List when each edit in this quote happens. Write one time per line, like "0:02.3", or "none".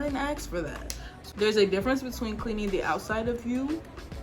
0:01.2